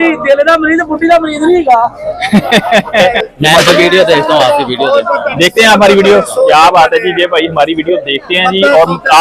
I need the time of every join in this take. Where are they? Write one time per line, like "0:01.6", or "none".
0:03.0